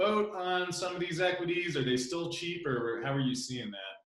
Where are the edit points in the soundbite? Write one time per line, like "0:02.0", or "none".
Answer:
none